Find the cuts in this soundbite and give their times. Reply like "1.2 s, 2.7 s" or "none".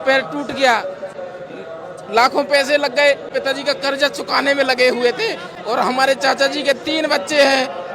3.3 s